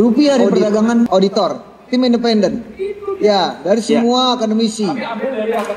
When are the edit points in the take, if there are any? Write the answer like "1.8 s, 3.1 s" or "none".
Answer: 1.1 s